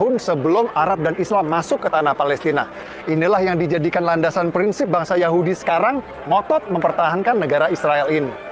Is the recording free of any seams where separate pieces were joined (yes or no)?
yes